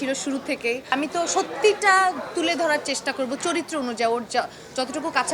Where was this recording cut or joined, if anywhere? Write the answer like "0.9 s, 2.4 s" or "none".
0.9 s